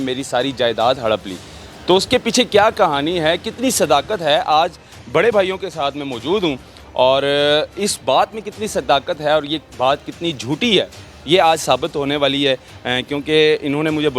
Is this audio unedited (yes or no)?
yes